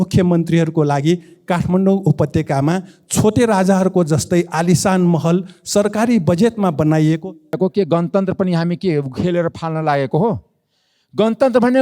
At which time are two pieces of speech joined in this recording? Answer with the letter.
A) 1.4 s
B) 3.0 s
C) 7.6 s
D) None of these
C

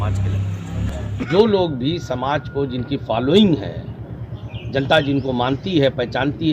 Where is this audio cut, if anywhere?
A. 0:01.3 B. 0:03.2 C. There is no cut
A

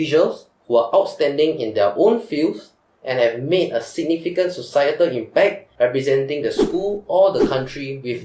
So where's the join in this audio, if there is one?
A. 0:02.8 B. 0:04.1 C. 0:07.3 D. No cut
D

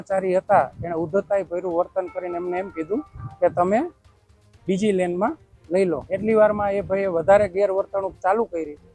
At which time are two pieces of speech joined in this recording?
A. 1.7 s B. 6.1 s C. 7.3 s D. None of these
B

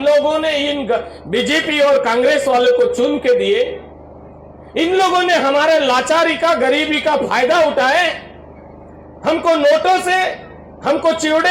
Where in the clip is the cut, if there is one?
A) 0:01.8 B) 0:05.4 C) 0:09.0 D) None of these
D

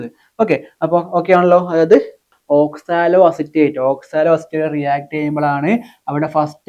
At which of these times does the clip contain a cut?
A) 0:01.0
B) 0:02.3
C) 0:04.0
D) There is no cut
B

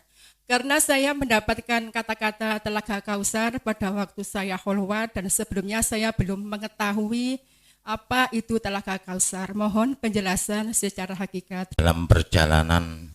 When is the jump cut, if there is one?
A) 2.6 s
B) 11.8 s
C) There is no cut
B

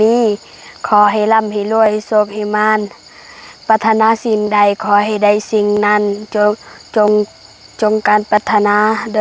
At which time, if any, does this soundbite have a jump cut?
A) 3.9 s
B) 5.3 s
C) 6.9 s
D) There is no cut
D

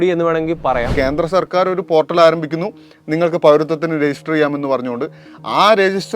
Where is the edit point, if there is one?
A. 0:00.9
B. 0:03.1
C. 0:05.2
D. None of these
A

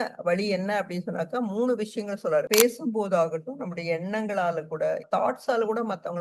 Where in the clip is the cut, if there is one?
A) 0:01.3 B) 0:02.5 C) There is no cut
B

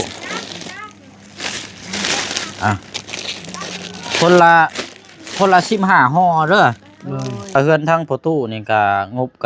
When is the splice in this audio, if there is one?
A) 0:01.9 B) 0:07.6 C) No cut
B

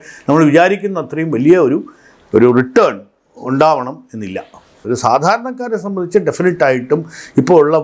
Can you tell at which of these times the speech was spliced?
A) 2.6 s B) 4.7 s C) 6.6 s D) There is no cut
B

